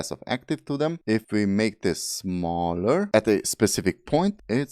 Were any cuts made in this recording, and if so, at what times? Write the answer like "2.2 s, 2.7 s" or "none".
1.1 s, 3.1 s

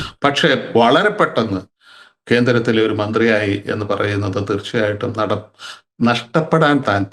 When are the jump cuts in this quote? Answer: none

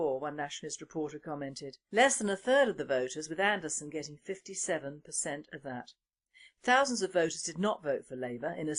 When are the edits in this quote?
none

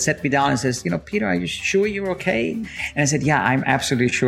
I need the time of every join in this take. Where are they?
2.6 s

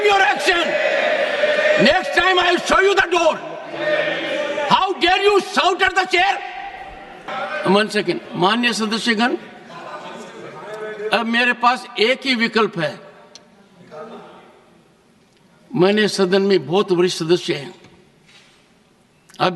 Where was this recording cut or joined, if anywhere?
7.3 s

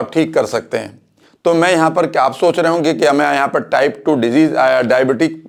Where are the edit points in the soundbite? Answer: none

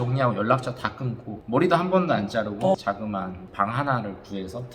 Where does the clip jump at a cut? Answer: none

